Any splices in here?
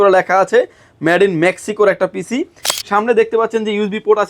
yes; 1 cut; at 2.7 s

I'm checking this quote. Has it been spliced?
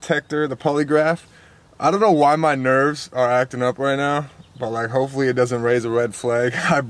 no; 0 cuts

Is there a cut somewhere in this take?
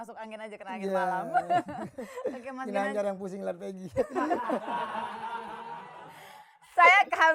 no; 0 cuts

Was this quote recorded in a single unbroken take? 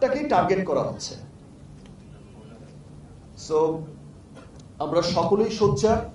yes; 0 cuts

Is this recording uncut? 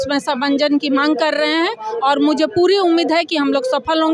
yes; 0 cuts

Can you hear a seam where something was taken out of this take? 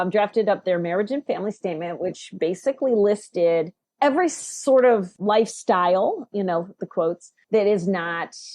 yes; 3 cuts; at 3.8 s, 5.1 s, 7.3 s

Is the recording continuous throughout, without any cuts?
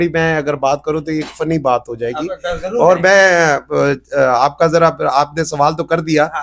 yes; 0 cuts

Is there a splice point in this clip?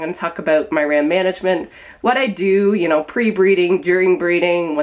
no; 0 cuts

